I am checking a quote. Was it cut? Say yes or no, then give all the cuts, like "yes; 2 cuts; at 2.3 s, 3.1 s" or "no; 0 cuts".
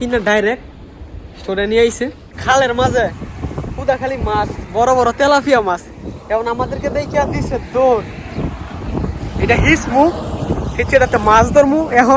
yes; 1 cut; at 2.3 s